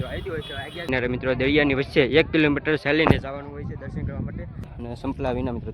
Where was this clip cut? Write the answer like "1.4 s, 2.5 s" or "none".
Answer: 0.8 s, 4.7 s